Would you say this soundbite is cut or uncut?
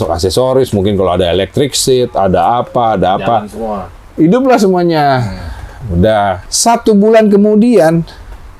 cut